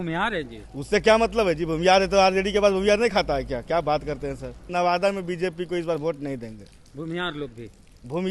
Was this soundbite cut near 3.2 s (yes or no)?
no